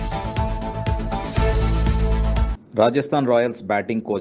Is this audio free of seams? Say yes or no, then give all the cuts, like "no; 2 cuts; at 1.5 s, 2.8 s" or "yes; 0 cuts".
no; 1 cut; at 2.5 s